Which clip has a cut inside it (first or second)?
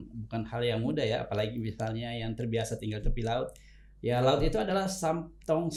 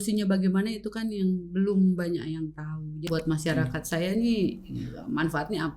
second